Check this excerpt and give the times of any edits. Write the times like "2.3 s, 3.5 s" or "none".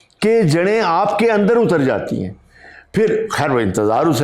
none